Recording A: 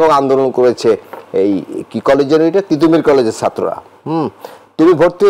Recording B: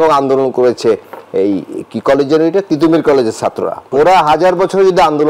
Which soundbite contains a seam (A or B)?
B